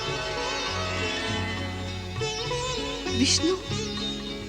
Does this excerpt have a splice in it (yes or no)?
no